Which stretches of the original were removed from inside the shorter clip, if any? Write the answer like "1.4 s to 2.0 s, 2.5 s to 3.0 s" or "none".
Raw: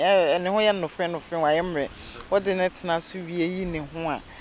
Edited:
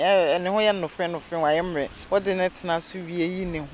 2.0 s to 2.2 s

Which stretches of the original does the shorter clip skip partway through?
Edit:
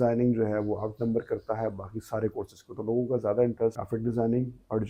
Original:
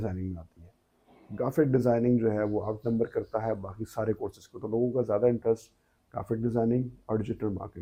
5.7 s to 6.2 s

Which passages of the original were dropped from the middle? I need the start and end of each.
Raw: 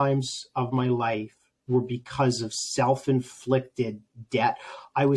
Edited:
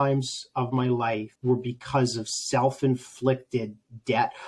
1.3 s to 1.6 s

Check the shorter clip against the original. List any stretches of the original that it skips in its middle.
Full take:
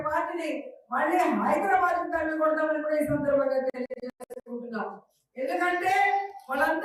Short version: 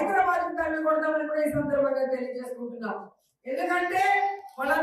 3.7 s to 4.1 s

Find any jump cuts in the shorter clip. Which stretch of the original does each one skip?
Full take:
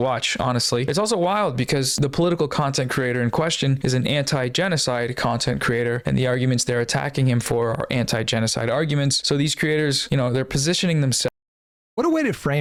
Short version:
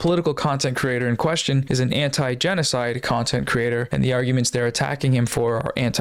none

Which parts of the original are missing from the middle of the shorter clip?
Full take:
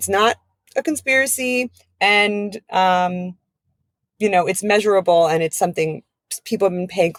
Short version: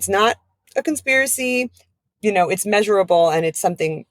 1.8 s to 3.8 s

